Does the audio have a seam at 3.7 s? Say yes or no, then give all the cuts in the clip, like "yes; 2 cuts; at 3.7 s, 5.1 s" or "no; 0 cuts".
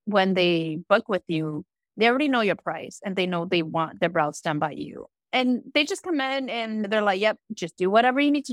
no; 1 cut; at 6.9 s